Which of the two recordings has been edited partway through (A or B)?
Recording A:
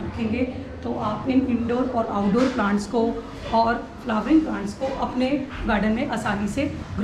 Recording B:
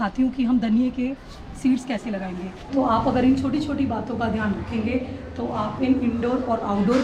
B